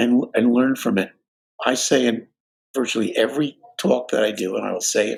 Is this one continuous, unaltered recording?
yes; 0 cuts

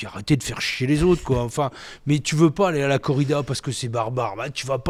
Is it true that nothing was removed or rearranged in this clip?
yes; 0 cuts

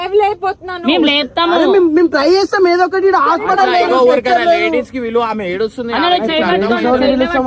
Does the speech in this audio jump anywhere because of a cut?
no; 0 cuts

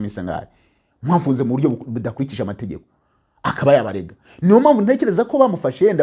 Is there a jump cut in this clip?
no; 0 cuts

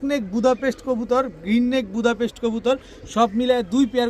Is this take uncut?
yes; 0 cuts

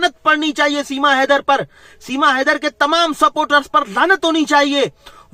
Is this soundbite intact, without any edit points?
yes; 0 cuts

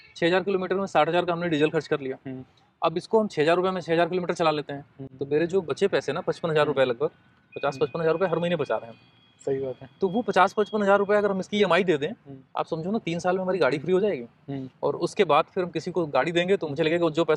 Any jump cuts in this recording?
no; 0 cuts

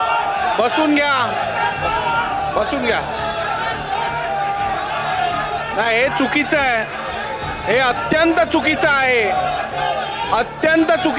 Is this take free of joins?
yes; 0 cuts

